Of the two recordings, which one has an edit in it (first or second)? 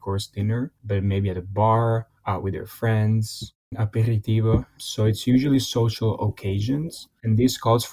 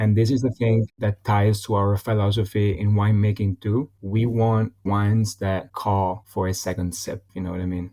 first